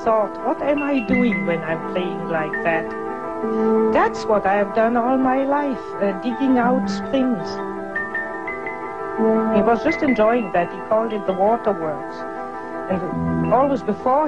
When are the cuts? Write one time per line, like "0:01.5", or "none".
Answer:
0:10.5